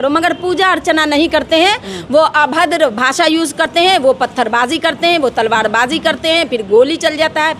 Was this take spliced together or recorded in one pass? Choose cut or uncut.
uncut